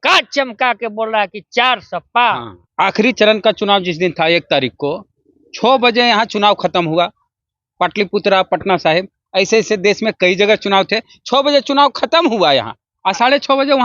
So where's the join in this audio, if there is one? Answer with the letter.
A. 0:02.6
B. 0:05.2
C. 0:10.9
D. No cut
A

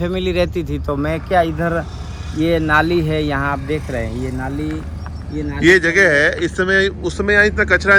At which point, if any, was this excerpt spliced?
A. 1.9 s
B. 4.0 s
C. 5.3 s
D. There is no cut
D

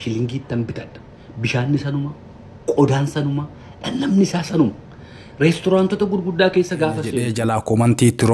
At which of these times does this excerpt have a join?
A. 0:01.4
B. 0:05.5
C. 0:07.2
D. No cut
C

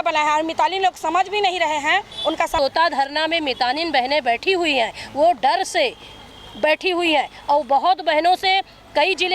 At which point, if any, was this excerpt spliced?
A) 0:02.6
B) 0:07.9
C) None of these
A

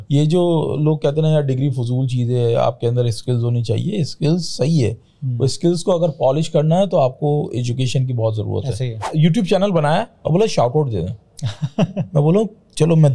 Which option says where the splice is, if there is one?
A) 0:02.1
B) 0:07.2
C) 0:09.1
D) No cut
C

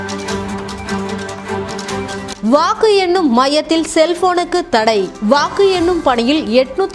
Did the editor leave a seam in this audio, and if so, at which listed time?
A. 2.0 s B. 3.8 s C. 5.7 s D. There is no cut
A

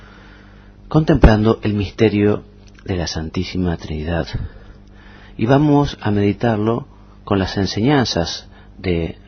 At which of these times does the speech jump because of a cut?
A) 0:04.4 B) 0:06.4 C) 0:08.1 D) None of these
B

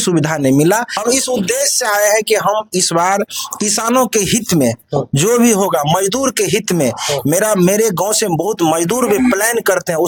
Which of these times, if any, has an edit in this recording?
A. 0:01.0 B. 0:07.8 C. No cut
C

